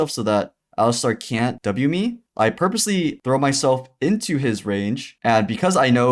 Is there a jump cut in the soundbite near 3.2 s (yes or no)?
yes